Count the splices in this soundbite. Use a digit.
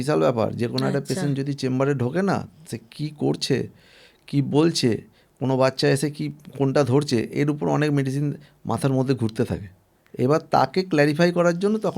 0